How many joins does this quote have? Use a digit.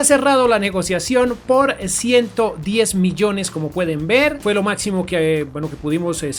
0